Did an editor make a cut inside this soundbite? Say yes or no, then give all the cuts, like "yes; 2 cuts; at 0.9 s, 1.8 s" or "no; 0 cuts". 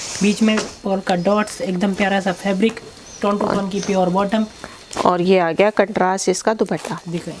no; 0 cuts